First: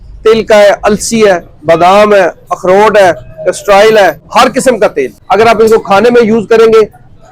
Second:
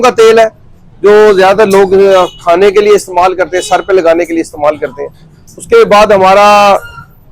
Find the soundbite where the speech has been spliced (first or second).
first